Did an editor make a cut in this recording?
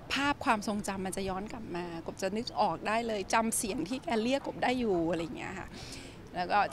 no; 0 cuts

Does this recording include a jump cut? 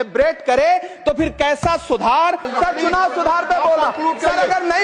yes; 1 cut; at 2.5 s

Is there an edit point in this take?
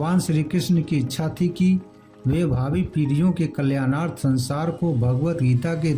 no; 0 cuts

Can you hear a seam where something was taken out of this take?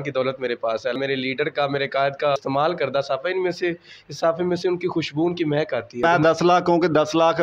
yes; 3 cuts; at 1.0 s, 2.4 s, 6.0 s

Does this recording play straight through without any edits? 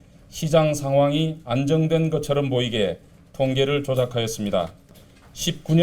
no; 1 cut; at 4.9 s

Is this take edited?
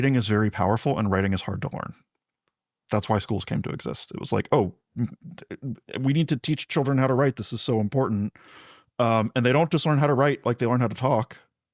no; 0 cuts

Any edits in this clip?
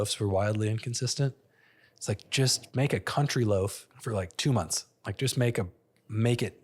yes; 2 cuts; at 2.6 s, 3.9 s

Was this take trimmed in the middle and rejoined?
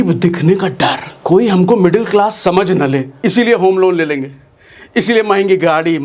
yes; 2 cuts; at 1.1 s, 3.1 s

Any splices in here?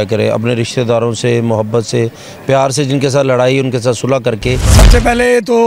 yes; 1 cut; at 4.7 s

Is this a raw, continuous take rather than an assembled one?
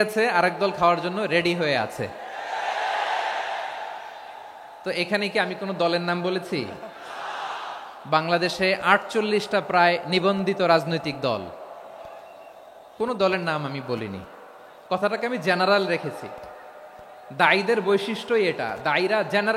yes; 0 cuts

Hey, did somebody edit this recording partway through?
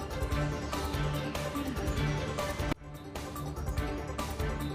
no; 0 cuts

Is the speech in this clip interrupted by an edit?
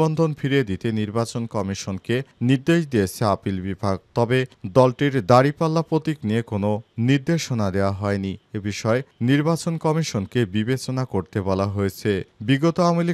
no; 0 cuts

